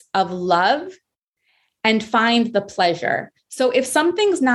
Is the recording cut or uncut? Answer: uncut